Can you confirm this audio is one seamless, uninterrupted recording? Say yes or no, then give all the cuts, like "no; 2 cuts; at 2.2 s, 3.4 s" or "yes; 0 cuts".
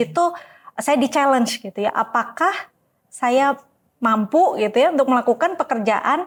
yes; 0 cuts